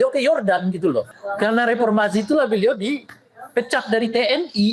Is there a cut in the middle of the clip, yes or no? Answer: yes